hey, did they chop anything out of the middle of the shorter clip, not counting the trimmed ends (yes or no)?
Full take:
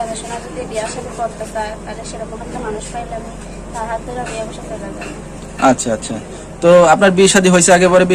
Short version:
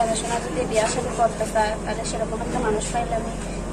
no